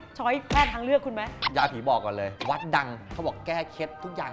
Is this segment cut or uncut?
cut